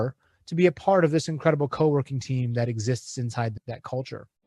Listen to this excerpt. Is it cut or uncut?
cut